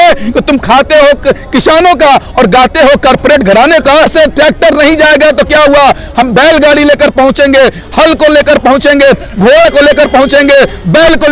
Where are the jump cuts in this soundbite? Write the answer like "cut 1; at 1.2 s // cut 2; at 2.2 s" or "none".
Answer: cut 1; at 4.1 s